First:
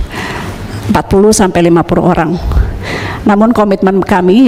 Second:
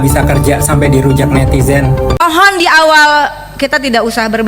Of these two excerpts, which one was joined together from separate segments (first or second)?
second